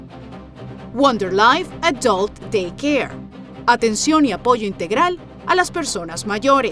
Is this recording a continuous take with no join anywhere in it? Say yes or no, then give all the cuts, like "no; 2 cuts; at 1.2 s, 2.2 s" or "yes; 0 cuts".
no; 1 cut; at 0.9 s